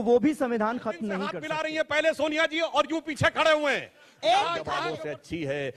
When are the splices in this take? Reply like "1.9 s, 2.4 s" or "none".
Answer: 1.4 s, 4.8 s